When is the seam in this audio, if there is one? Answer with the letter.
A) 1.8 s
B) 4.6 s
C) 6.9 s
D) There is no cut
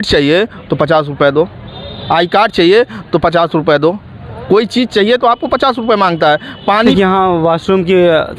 C